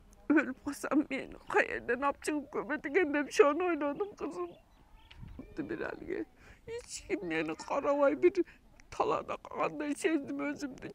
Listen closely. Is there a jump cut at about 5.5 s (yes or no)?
yes